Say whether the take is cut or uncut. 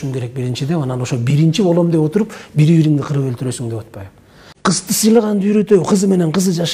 cut